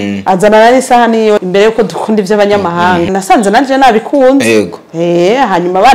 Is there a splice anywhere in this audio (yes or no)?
yes